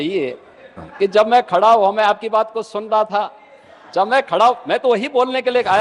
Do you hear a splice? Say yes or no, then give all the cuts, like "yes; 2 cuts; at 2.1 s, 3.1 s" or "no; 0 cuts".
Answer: no; 0 cuts